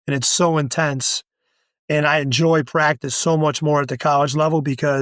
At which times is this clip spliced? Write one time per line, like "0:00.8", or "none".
none